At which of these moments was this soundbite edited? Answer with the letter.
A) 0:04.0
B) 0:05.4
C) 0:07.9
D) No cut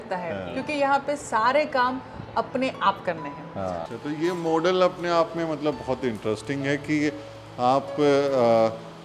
A